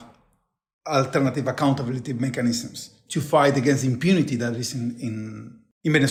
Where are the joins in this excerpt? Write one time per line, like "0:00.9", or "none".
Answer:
none